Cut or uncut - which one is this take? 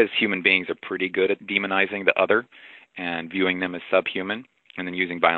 cut